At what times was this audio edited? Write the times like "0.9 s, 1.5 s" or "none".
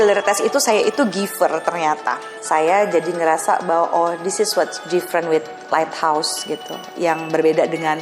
2.3 s